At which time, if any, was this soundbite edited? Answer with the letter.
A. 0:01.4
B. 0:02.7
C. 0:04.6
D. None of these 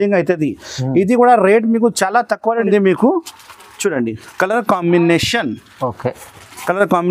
B